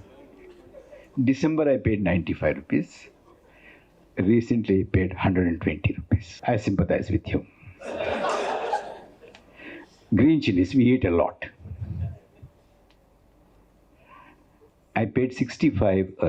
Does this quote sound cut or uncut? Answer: cut